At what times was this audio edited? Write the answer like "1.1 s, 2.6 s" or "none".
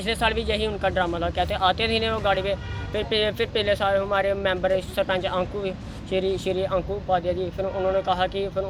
none